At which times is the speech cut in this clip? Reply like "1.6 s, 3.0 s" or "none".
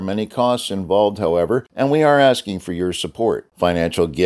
1.7 s